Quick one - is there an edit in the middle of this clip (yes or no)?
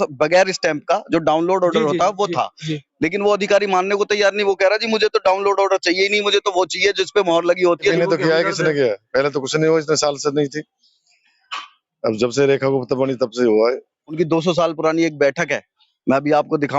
yes